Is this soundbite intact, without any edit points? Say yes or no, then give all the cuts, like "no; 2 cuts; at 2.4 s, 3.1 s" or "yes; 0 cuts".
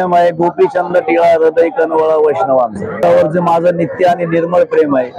no; 1 cut; at 3.0 s